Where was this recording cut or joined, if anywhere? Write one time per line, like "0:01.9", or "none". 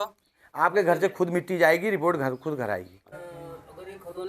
0:03.1